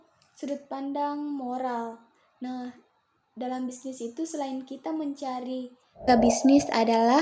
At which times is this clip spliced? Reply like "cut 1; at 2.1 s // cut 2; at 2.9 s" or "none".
cut 1; at 6.0 s